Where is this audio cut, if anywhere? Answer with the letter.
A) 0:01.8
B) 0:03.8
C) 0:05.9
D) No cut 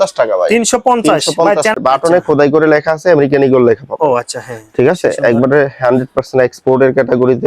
A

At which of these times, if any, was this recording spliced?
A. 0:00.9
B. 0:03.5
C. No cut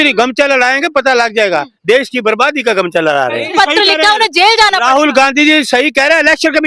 B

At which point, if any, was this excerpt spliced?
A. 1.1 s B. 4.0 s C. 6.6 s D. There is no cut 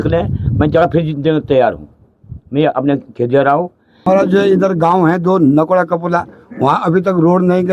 B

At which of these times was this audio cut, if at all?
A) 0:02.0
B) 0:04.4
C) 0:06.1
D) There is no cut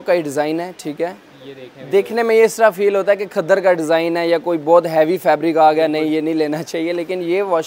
D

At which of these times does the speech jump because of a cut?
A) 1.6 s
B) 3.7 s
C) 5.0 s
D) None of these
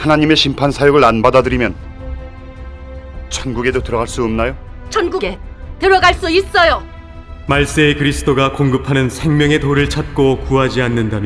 A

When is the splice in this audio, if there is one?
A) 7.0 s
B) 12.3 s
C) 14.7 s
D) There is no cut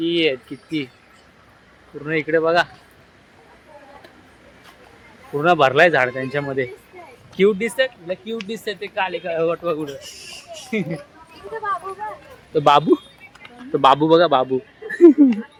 D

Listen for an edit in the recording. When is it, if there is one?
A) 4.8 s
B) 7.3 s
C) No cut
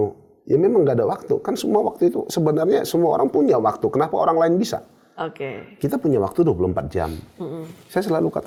C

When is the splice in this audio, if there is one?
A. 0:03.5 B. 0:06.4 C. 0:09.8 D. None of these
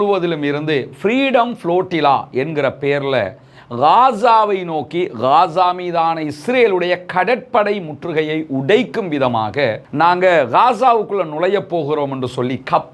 D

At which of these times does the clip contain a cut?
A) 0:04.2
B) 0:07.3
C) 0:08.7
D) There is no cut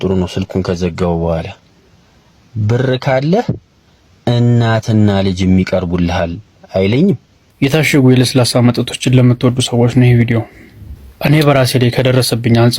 B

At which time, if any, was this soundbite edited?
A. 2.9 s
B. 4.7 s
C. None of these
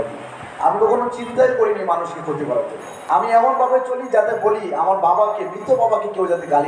A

